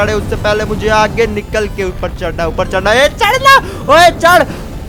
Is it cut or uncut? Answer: uncut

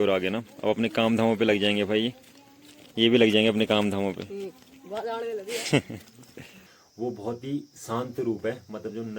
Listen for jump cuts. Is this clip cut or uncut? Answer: cut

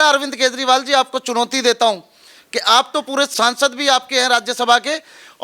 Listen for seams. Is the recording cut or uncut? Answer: uncut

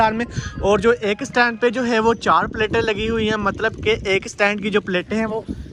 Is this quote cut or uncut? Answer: uncut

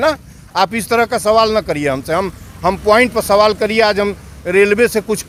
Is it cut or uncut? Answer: uncut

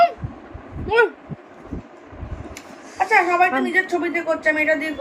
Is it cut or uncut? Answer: uncut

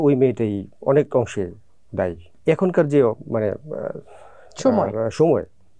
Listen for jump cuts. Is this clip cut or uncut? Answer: cut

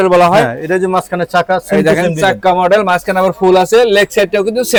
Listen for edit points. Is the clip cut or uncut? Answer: uncut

